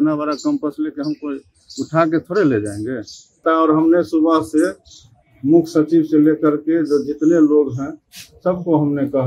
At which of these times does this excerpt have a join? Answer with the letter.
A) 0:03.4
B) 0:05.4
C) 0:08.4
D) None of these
A